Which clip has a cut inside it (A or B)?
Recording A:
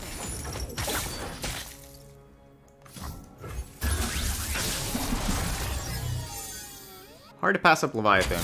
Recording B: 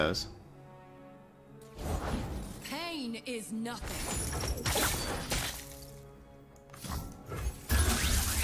A